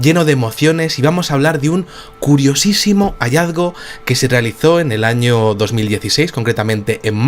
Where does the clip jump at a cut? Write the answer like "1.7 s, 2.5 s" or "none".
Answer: none